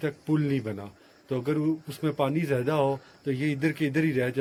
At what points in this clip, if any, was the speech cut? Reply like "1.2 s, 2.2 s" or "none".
none